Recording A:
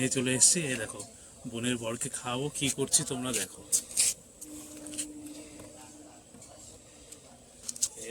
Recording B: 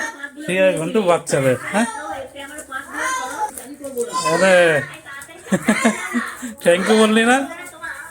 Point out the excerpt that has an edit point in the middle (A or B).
B